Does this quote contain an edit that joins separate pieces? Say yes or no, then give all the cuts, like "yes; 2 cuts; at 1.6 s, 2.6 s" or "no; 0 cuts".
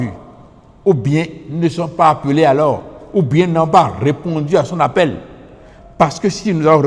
no; 0 cuts